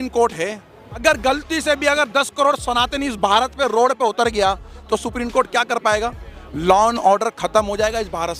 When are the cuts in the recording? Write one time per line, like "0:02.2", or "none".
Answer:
0:01.0